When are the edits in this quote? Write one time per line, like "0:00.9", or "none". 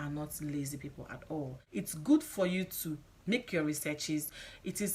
0:01.6